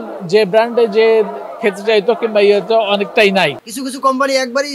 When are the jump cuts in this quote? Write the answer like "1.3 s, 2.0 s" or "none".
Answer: 3.7 s